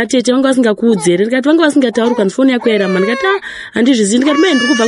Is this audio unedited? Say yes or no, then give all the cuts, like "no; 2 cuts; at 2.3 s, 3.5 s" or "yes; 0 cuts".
yes; 0 cuts